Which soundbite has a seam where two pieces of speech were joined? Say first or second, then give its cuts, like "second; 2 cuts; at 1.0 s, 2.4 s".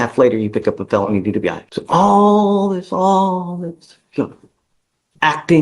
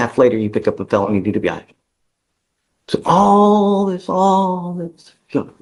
first; 1 cut; at 1.7 s